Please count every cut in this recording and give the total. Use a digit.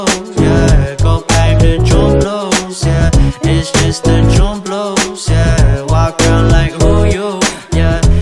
1